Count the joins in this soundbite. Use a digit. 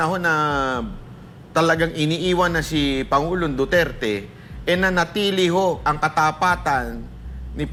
0